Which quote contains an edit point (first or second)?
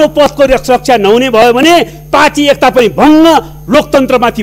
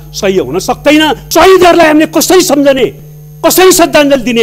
second